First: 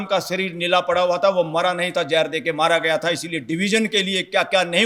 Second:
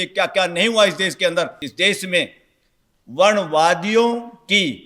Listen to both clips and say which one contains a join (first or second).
second